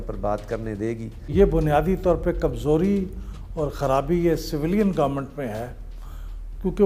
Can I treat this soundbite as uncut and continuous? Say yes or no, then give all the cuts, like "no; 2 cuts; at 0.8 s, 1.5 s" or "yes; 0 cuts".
no; 1 cut; at 1.3 s